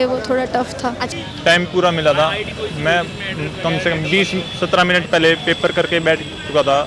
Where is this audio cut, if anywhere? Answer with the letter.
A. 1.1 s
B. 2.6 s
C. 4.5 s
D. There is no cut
A